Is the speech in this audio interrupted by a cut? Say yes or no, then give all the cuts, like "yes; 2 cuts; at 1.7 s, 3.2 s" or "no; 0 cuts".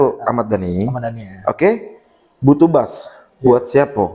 no; 0 cuts